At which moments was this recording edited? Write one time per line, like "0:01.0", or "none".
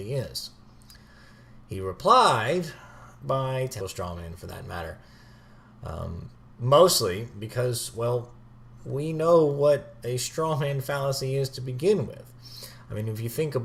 none